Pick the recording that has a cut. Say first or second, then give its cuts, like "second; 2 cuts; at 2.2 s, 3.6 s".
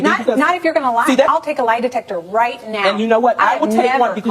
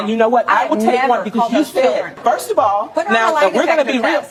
first; 1 cut; at 1.3 s